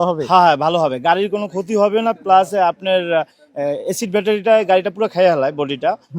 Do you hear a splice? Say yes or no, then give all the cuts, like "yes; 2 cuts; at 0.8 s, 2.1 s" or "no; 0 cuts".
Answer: no; 0 cuts